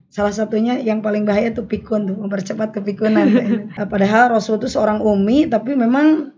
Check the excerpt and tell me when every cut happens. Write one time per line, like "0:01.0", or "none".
0:03.8